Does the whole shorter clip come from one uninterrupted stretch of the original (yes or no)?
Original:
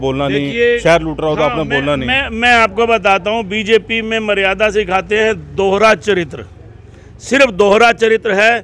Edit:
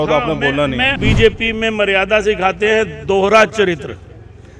no